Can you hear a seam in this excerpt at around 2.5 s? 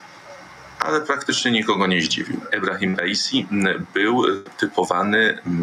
yes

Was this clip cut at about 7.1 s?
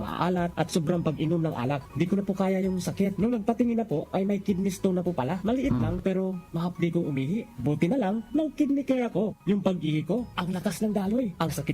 yes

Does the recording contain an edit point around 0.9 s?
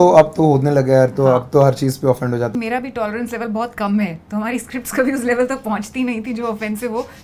no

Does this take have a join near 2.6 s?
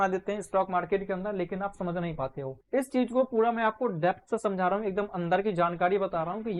no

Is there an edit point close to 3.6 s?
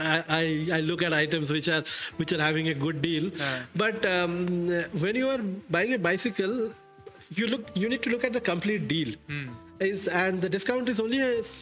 no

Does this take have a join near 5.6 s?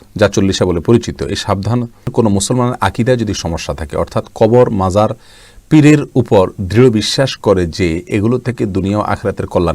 no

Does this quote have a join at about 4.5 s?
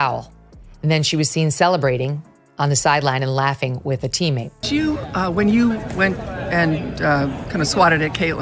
yes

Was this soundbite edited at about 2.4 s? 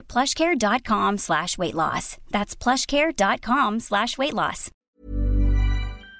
no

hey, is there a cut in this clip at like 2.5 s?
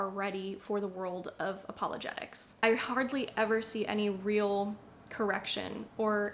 yes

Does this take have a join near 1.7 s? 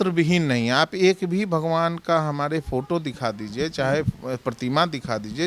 no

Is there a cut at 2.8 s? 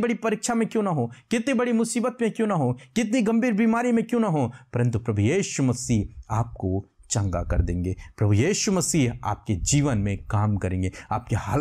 no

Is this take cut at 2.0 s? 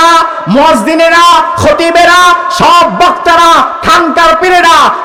no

